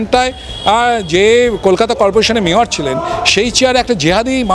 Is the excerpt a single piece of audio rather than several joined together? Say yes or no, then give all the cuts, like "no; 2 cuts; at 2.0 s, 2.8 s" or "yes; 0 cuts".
yes; 0 cuts